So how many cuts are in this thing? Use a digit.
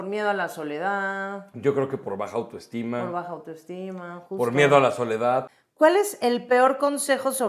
1